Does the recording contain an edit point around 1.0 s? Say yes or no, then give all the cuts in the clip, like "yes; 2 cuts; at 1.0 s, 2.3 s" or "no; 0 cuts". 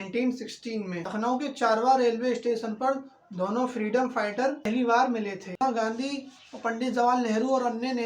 yes; 2 cuts; at 1.0 s, 5.5 s